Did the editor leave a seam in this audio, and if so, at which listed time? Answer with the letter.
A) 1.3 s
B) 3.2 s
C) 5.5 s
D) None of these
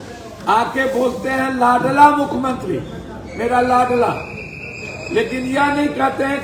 D